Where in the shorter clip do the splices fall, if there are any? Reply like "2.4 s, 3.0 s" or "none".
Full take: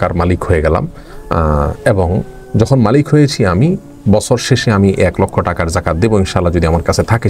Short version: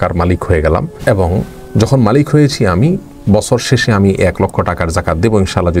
1.0 s